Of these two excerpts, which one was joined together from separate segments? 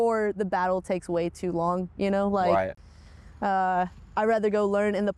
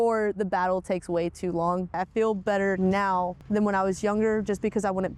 second; 2 cuts; at 2.0 s, 3.4 s

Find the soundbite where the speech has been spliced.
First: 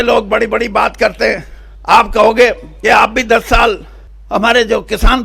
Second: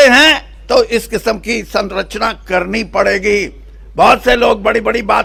first; 1 cut; at 4.2 s

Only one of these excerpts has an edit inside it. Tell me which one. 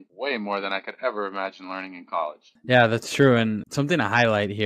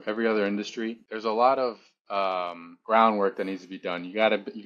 second; 1 cut; at 1.1 s

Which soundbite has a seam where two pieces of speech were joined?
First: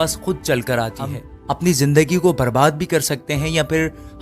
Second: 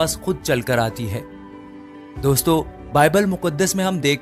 first; 1 cut; at 1.3 s

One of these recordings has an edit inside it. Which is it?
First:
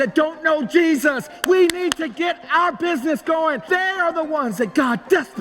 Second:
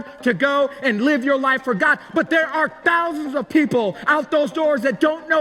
first; 1 cut; at 3.6 s

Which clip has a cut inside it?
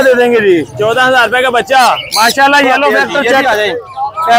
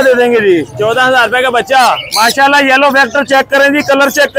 first; 1 cut; at 3.4 s

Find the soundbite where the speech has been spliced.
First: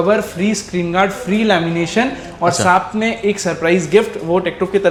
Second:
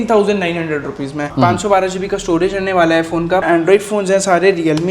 second; 2 cuts; at 1.3 s, 3.4 s

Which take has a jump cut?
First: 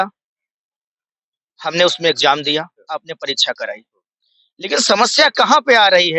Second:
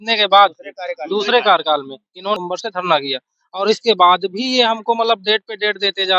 second; 1 cut; at 2.4 s

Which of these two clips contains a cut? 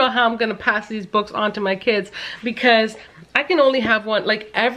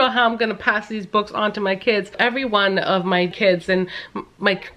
second; 2 cuts; at 2.2 s, 3.3 s

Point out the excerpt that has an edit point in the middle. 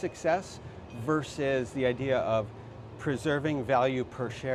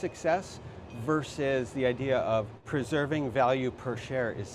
second; 1 cut; at 2.6 s

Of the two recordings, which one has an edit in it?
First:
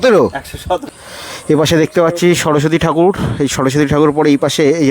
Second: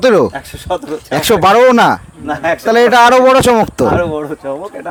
first; 1 cut; at 0.9 s

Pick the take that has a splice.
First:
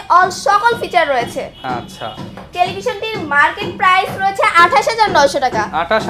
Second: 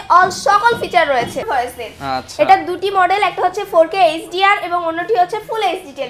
second; 1 cut; at 1.5 s

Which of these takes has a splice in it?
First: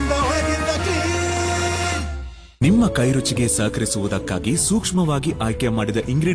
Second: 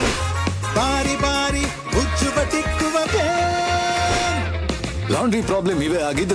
first; 1 cut; at 2.5 s

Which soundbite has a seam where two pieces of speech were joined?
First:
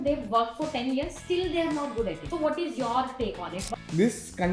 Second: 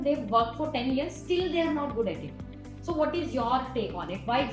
first; 2 cuts; at 2.2 s, 3.6 s

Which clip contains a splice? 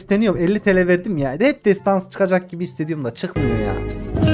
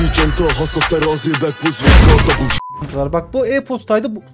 second; 1 cut; at 2.7 s

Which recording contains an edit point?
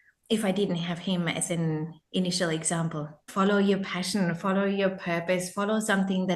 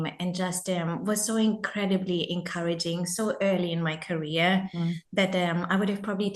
first; 1 cut; at 3.2 s

